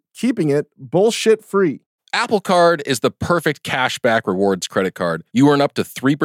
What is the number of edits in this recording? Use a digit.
1